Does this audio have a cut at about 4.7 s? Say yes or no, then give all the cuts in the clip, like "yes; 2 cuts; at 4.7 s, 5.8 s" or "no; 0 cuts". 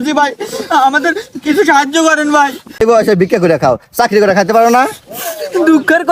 no; 1 cut; at 2.8 s